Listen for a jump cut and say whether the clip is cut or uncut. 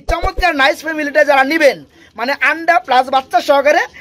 uncut